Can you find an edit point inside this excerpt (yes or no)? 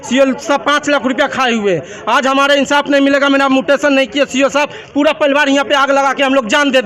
no